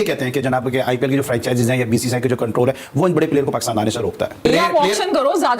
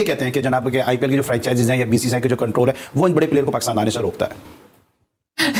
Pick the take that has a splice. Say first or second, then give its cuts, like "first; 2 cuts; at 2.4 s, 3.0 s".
first; 1 cut; at 4.4 s